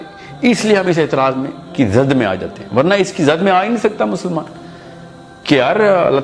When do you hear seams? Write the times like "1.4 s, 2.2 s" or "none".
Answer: none